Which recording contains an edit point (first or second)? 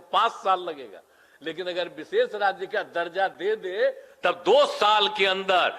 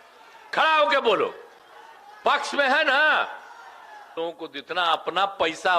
second